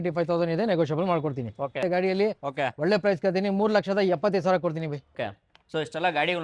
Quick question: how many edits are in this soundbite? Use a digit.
2